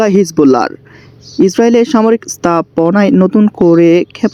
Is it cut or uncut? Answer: uncut